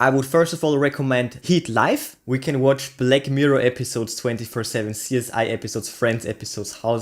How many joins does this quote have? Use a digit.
1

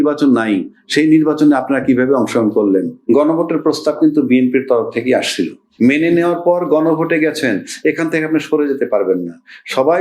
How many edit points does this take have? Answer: 2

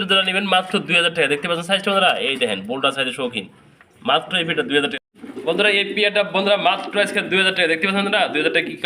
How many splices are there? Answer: 1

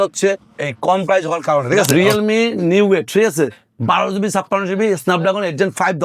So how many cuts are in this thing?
1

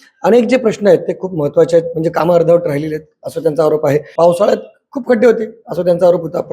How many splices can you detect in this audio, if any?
1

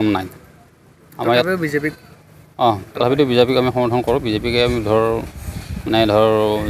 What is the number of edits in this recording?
0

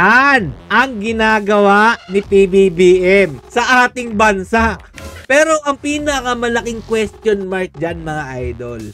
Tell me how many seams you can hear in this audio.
2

